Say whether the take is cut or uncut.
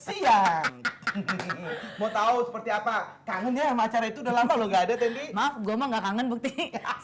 uncut